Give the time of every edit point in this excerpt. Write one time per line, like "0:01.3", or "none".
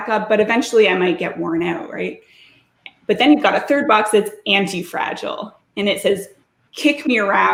none